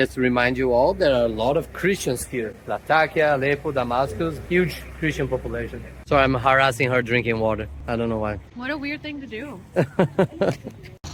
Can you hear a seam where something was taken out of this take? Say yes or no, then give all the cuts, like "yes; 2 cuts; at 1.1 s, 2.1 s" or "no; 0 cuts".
no; 0 cuts